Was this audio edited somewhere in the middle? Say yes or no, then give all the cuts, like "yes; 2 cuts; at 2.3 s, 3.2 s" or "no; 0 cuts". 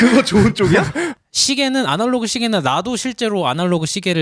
yes; 1 cut; at 1.1 s